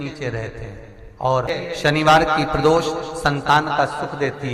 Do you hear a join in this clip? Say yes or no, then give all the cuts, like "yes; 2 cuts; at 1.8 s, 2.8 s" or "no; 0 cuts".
yes; 1 cut; at 1.5 s